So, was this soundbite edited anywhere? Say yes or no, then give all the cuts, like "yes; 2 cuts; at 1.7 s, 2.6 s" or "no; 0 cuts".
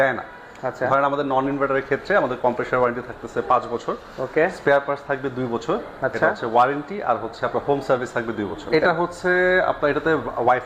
yes; 1 cut; at 8.7 s